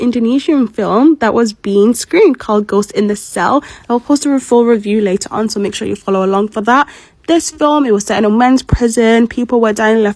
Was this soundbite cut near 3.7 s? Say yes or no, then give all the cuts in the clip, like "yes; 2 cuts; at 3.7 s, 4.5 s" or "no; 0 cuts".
no; 0 cuts